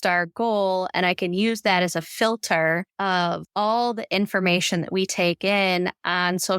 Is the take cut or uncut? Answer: cut